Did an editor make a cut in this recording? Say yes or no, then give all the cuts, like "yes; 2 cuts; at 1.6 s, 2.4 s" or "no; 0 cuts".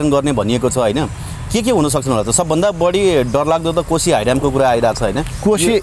no; 0 cuts